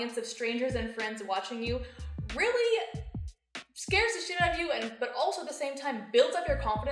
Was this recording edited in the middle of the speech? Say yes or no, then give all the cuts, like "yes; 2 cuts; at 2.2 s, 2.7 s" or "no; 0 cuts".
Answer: no; 0 cuts